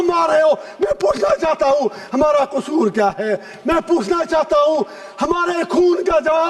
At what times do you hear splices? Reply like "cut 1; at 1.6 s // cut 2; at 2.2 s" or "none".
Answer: none